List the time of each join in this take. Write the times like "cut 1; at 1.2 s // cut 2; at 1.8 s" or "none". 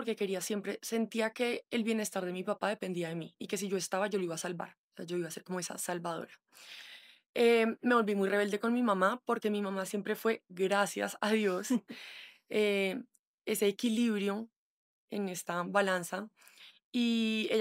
none